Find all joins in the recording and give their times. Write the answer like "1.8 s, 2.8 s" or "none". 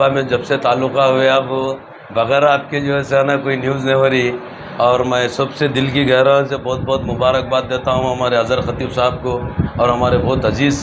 none